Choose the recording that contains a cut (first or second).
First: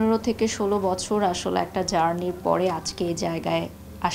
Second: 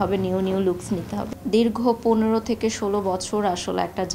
second